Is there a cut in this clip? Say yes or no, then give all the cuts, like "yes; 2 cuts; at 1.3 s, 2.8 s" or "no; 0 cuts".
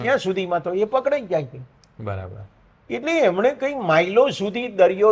no; 0 cuts